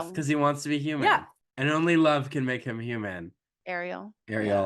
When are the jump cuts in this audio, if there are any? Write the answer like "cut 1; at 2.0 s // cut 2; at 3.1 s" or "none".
cut 1; at 1.4 s